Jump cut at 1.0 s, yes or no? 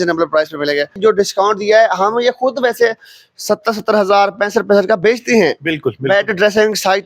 yes